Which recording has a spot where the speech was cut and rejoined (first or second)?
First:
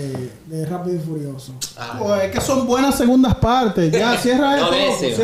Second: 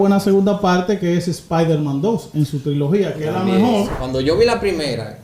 second